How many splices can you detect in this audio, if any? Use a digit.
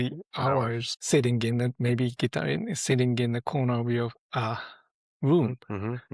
1